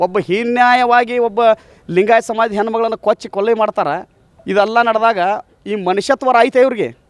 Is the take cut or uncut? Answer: uncut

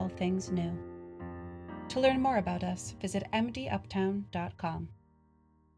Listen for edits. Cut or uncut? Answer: cut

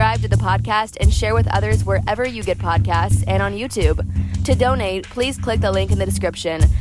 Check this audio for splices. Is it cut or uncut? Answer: uncut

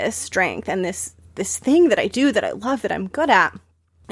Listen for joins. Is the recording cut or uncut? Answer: uncut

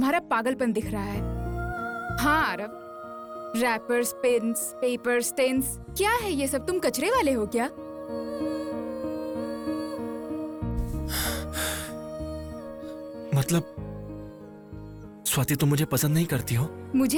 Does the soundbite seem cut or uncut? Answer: uncut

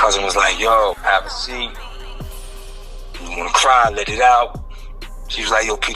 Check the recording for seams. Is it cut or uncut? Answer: cut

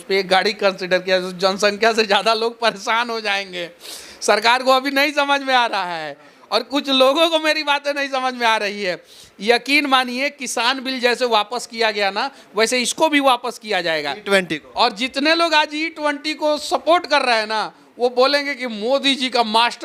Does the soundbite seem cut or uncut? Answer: uncut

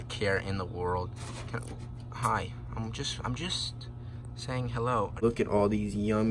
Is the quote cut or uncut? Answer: cut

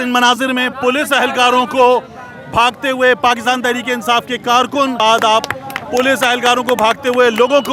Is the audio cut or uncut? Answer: cut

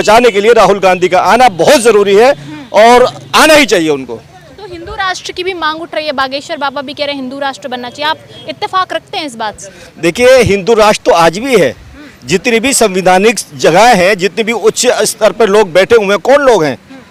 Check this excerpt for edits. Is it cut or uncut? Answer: uncut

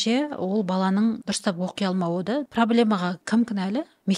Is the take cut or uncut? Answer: cut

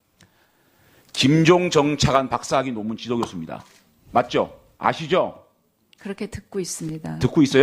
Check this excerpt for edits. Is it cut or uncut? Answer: cut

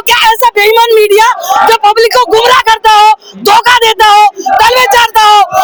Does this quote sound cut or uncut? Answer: uncut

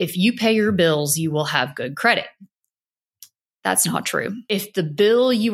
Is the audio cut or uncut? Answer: cut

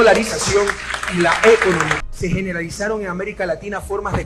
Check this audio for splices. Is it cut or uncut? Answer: cut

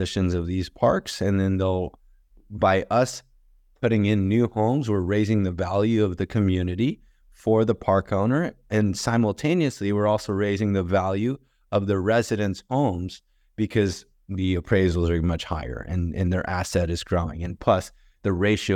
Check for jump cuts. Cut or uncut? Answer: uncut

